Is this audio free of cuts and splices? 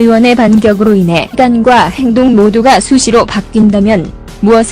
yes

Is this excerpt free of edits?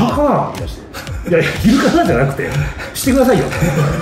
yes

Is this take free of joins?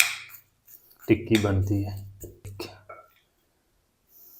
no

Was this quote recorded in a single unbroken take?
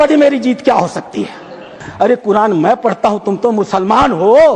no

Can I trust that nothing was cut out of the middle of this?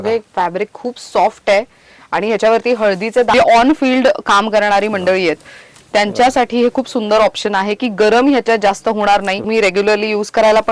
no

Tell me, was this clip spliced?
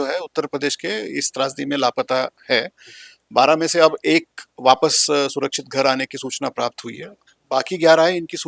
no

